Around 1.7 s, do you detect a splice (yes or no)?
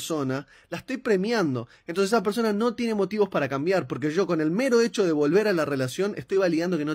no